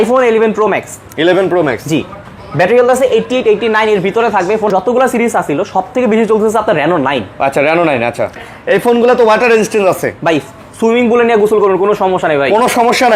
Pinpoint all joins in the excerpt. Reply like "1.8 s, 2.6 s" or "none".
4.7 s, 8.5 s